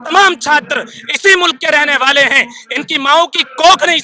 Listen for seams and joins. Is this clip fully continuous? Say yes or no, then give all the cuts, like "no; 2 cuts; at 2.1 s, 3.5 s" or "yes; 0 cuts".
yes; 0 cuts